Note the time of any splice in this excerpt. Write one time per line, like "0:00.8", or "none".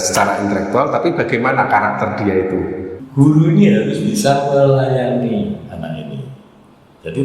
0:03.0